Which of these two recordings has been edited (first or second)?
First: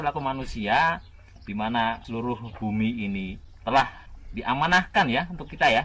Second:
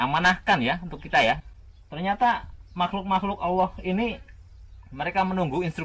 first